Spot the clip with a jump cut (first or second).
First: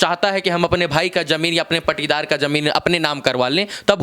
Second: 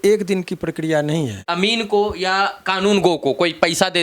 second